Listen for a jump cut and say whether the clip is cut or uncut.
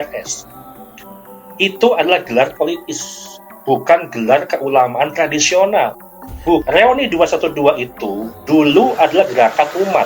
cut